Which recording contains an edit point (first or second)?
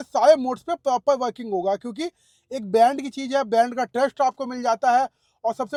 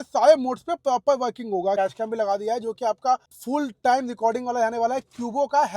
second